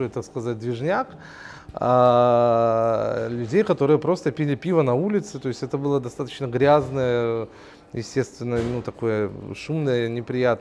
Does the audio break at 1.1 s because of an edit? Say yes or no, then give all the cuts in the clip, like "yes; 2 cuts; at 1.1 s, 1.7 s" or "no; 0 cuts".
no; 0 cuts